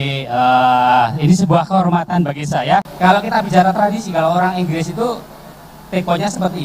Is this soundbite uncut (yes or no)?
no